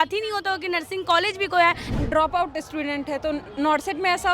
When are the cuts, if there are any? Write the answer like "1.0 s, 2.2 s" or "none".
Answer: 1.8 s